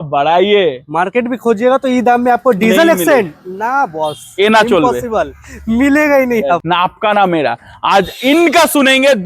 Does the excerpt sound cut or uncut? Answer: cut